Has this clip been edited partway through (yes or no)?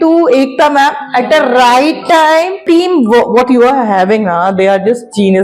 yes